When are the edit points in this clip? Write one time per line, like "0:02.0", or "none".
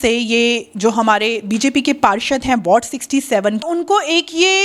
0:03.6

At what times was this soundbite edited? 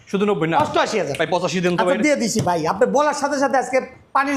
none

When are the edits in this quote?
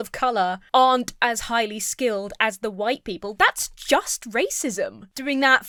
none

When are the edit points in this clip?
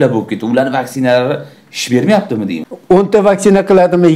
0:02.7

